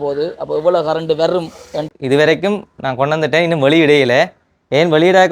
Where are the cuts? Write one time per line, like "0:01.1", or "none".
0:01.8